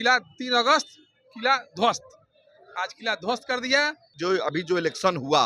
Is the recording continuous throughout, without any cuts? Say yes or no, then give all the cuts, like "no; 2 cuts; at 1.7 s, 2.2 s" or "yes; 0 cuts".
no; 1 cut; at 4.1 s